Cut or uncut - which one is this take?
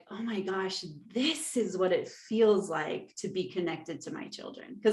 uncut